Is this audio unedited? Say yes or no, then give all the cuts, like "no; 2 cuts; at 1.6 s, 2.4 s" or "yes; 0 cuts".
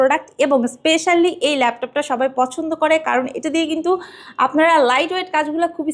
yes; 0 cuts